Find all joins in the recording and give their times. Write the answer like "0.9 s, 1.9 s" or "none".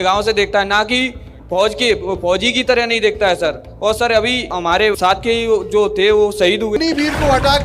6.8 s